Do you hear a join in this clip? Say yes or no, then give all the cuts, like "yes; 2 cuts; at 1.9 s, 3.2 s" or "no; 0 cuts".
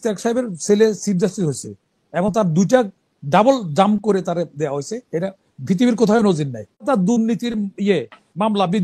yes; 1 cut; at 6.8 s